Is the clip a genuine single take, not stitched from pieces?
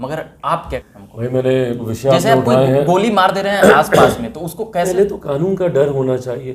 no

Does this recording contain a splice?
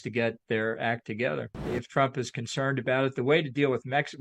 yes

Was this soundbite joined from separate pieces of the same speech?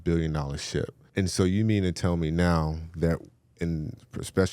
yes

